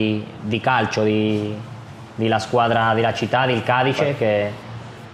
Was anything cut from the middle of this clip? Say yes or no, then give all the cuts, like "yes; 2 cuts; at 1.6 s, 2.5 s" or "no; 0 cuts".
no; 0 cuts